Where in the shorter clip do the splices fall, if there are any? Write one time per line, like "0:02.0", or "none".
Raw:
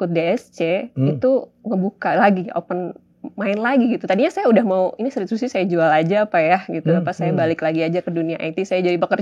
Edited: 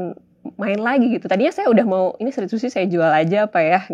none